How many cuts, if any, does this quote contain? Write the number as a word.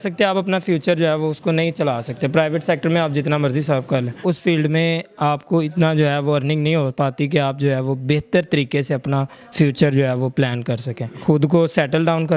two